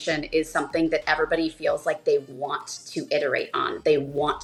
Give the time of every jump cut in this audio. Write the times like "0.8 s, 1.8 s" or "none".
none